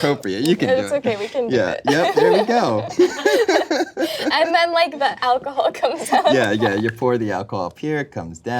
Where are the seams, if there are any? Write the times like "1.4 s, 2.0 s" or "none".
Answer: 2.9 s, 5.0 s